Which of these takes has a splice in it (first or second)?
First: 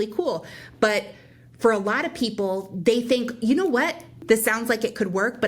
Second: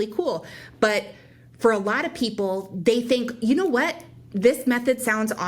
first